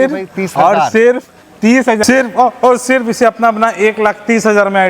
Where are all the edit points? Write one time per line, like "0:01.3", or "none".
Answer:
0:02.0